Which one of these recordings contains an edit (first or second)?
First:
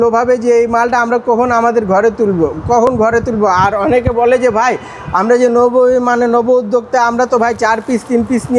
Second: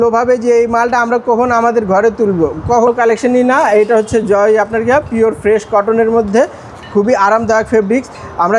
second